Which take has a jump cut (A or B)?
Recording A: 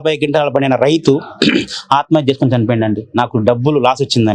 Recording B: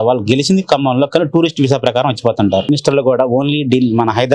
B